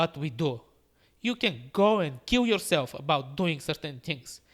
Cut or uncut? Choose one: uncut